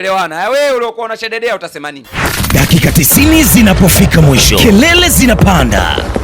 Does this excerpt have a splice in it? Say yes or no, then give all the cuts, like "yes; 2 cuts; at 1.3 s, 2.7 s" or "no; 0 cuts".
yes; 1 cut; at 2.2 s